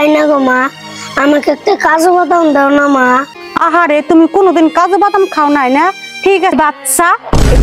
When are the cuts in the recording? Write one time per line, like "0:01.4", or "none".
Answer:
0:06.5